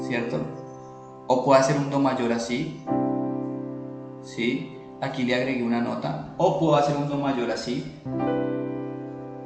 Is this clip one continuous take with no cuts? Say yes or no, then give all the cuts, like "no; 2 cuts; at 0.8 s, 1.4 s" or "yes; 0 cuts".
yes; 0 cuts